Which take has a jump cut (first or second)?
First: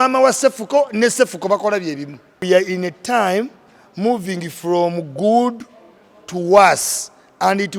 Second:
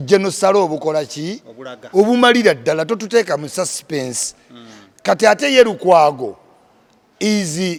first